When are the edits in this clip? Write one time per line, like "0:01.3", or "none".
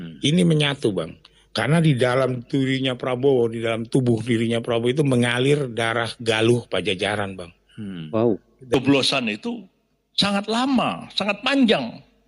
0:08.7